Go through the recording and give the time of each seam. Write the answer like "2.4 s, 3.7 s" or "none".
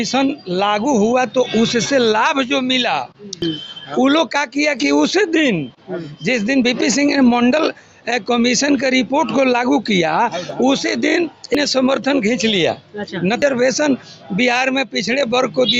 3.4 s, 11.6 s, 13.4 s